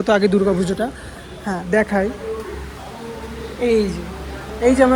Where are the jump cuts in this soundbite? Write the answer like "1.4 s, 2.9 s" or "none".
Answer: none